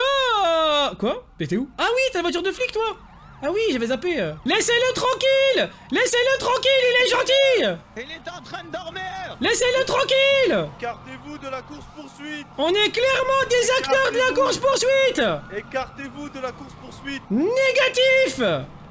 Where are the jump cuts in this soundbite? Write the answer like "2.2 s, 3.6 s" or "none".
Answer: 4.4 s, 9.3 s, 10.7 s, 12.5 s, 17.2 s